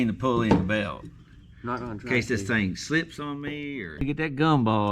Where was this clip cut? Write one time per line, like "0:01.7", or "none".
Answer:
0:04.0